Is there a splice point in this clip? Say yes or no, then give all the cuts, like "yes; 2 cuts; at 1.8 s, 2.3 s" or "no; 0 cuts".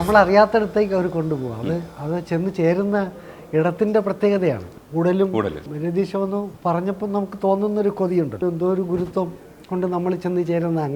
yes; 4 cuts; at 4.7 s, 5.7 s, 6.5 s, 8.4 s